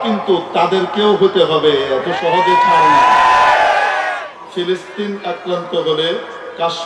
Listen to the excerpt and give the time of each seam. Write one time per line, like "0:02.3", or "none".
0:04.4